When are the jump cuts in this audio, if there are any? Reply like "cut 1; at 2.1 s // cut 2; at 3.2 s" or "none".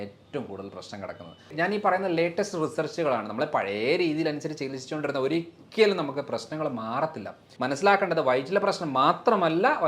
cut 1; at 1.5 s // cut 2; at 7.4 s